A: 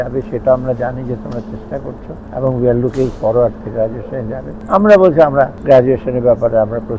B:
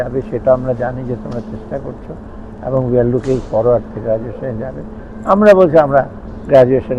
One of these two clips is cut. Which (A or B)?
A